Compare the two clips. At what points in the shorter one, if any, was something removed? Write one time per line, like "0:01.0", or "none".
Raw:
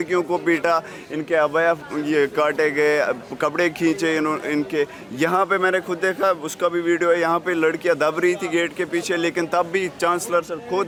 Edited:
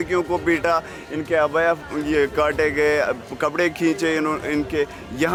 none